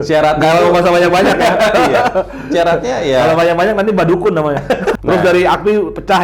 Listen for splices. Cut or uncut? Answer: cut